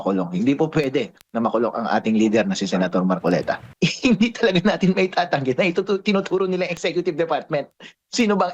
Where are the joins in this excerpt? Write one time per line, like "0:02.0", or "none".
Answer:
0:03.7